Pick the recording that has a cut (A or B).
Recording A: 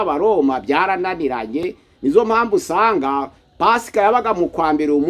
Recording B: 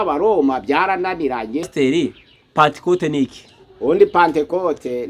B